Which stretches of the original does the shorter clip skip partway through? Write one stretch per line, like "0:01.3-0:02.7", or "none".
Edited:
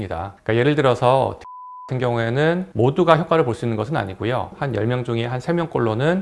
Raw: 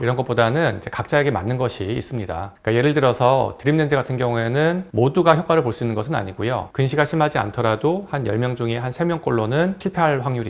0:06.7-0:08.0